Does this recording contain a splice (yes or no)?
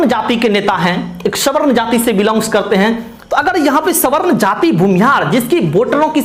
no